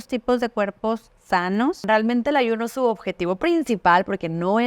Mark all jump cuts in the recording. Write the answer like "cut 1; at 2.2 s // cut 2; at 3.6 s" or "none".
cut 1; at 1.8 s